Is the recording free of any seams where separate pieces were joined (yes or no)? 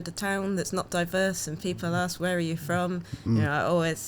yes